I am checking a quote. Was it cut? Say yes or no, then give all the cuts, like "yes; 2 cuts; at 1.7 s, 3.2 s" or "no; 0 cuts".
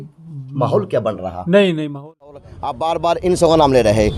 yes; 1 cut; at 2.4 s